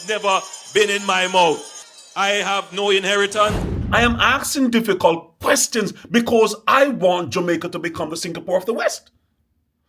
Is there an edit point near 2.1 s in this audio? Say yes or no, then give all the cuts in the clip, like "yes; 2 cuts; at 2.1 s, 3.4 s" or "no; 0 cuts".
no; 1 cut; at 3.7 s